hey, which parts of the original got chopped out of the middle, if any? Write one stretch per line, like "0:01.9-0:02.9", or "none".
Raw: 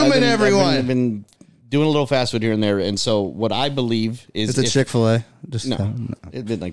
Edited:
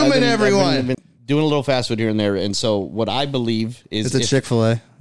0:00.9-0:01.4